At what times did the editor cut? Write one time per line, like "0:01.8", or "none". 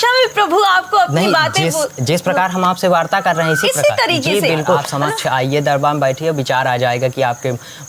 0:04.9

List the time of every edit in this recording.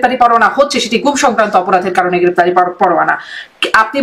none

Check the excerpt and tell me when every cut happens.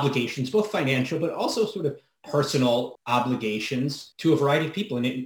0:03.0
0:04.1

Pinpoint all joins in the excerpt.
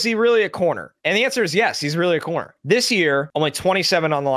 0:00.9
0:02.5
0:03.3

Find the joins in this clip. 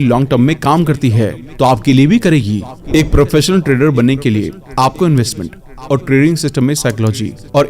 0:02.8

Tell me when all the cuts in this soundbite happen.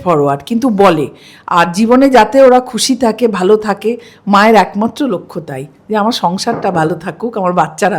none

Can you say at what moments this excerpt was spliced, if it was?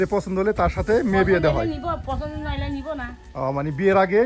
none

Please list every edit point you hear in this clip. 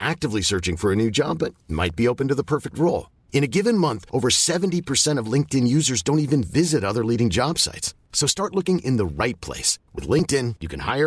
none

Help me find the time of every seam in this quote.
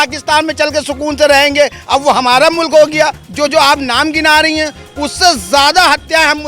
0:03.2

